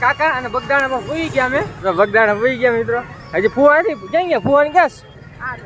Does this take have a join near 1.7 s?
yes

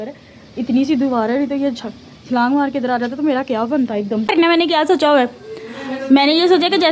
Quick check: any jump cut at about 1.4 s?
no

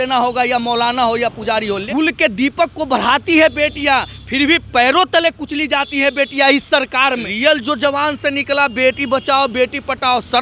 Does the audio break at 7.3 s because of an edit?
yes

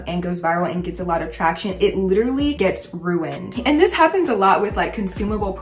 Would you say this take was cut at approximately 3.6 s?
no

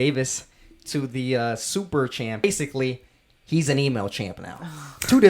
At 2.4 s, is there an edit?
yes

